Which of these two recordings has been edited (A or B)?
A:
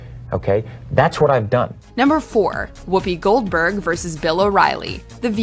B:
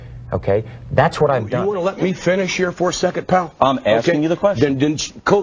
B